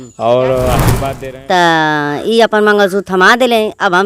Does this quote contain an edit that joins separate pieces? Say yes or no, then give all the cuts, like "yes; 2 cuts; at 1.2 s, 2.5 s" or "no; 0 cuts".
yes; 1 cut; at 1.0 s